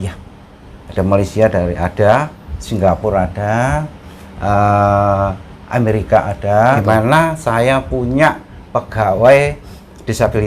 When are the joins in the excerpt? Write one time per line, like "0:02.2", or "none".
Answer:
0:06.8